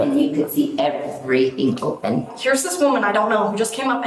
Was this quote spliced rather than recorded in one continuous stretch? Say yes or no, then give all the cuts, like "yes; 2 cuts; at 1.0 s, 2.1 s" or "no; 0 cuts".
yes; 1 cut; at 2.3 s